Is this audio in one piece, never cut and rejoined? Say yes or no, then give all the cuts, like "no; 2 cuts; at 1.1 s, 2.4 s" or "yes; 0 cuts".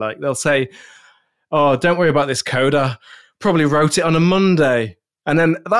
yes; 0 cuts